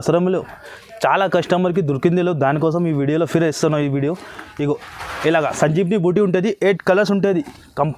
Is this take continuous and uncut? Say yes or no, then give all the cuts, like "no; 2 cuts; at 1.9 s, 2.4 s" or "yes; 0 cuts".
yes; 0 cuts